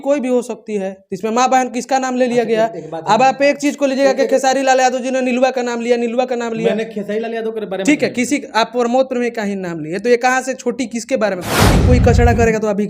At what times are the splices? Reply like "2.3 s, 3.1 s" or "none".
11.7 s